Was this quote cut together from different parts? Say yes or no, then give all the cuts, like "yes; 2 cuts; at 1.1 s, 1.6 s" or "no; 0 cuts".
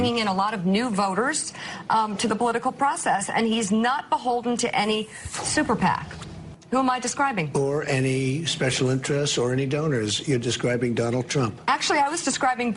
yes; 1 cut; at 11.9 s